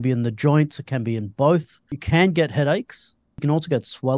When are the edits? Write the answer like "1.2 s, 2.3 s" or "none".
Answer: 2.0 s, 3.3 s